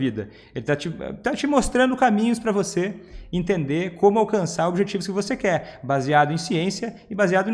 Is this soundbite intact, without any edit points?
yes; 0 cuts

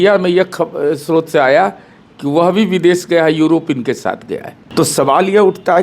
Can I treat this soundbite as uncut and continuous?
no; 1 cut; at 4.6 s

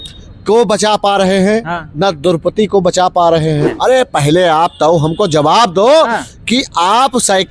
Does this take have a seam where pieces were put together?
yes; 1 cut; at 3.7 s

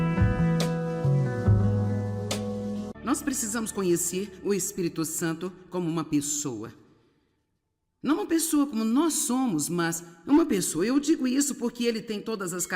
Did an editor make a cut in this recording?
yes; 1 cut; at 2.9 s

